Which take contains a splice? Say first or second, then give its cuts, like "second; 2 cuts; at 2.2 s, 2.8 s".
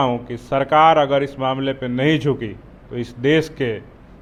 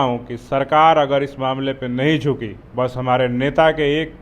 second; 1 cut; at 2.6 s